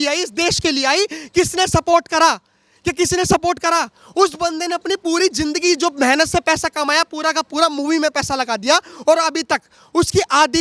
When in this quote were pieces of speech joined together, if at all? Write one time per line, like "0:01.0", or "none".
none

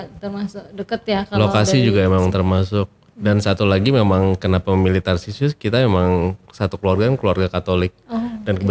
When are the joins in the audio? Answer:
0:03.0

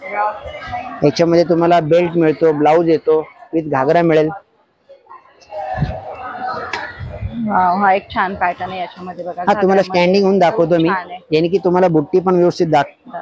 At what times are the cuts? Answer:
none

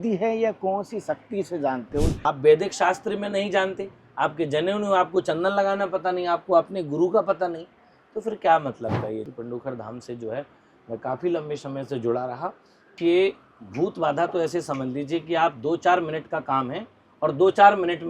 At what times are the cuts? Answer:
0:02.2
0:09.3
0:12.9

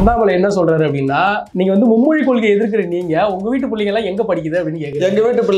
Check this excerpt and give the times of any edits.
0:01.5

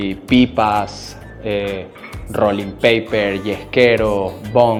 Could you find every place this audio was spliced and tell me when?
none

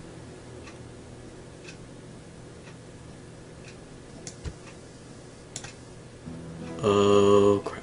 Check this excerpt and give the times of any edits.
0:01.3

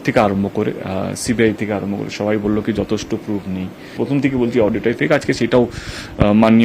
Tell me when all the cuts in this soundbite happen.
0:03.9

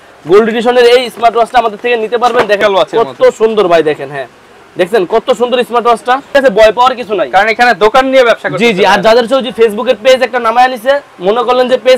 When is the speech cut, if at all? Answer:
0:02.6
0:06.3

